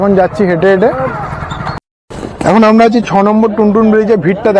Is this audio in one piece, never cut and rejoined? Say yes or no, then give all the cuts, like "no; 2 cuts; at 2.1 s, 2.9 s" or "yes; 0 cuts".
no; 1 cut; at 1.8 s